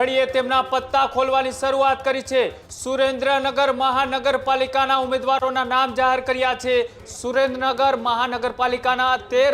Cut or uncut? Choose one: cut